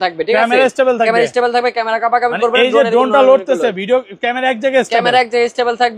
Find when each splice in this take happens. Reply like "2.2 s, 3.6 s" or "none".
none